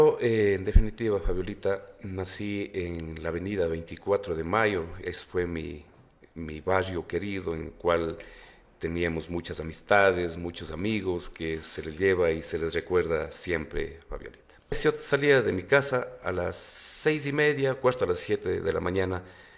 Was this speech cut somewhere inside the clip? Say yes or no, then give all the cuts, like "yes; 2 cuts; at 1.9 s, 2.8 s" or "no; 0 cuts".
yes; 1 cut; at 14.8 s